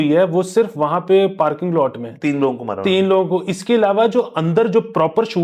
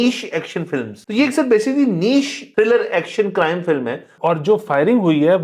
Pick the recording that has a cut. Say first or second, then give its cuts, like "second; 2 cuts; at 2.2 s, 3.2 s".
second; 3 cuts; at 1.0 s, 2.4 s, 4.1 s